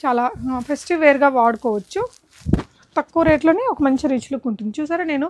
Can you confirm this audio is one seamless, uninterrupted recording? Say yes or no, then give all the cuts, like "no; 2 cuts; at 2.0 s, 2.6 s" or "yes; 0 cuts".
yes; 0 cuts